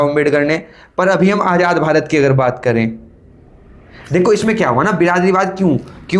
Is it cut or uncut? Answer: uncut